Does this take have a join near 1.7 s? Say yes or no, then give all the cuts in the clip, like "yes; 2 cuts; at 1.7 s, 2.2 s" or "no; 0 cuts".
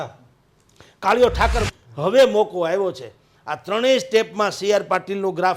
yes; 1 cut; at 1.7 s